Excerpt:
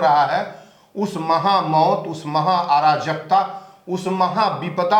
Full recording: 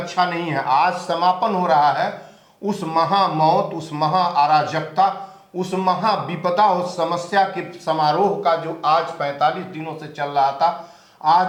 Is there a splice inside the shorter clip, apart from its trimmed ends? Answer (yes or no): no